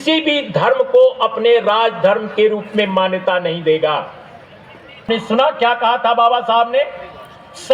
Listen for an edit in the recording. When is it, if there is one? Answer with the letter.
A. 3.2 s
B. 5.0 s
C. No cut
B